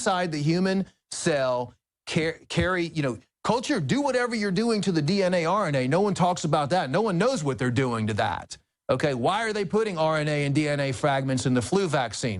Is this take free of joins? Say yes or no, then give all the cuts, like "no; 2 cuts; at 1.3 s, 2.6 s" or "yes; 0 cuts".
yes; 0 cuts